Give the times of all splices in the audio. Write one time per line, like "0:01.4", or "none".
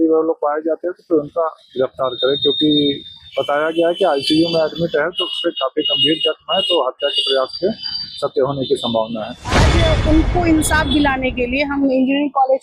0:09.7